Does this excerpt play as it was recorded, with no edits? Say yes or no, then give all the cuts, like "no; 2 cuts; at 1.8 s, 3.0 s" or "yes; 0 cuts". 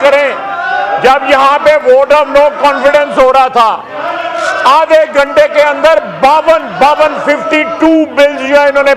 yes; 0 cuts